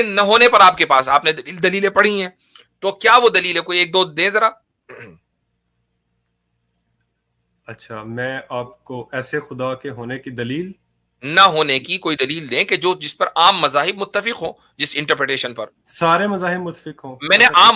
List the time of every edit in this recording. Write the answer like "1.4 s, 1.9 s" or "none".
none

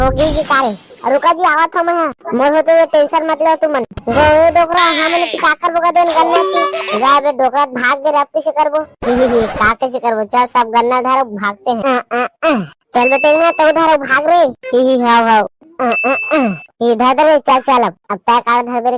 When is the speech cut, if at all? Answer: 11.8 s

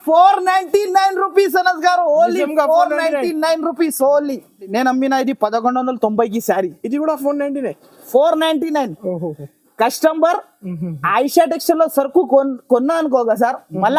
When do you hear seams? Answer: 4.7 s

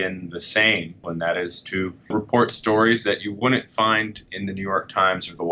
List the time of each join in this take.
1.1 s

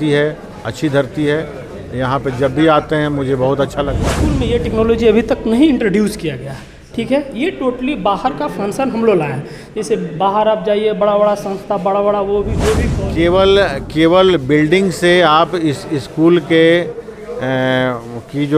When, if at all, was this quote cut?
4.3 s, 12.9 s

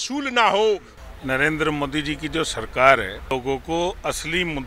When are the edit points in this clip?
0.9 s, 3.3 s

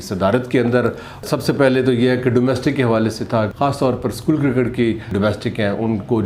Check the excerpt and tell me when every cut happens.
1.2 s, 3.5 s, 5.1 s

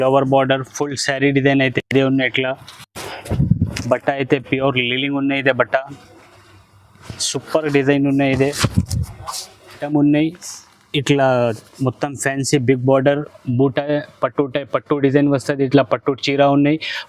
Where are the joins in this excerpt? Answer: 9.8 s

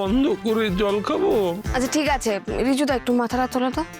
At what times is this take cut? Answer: 1.6 s

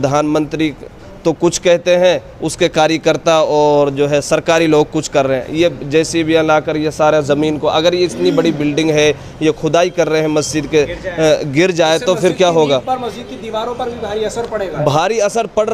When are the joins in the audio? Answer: none

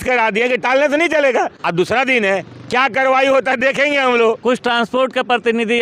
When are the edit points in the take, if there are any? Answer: 1.6 s, 4.4 s

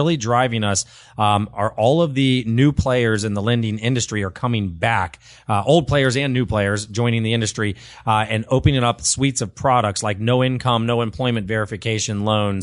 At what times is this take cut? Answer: none

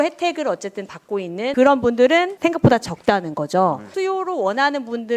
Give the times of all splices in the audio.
2.3 s, 3.9 s

